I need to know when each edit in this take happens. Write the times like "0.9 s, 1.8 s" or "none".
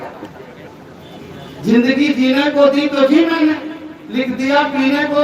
none